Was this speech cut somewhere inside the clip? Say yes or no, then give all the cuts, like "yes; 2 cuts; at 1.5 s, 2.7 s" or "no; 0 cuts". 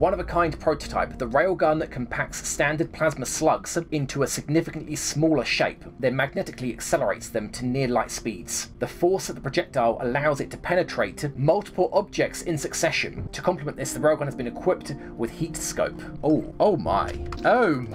no; 0 cuts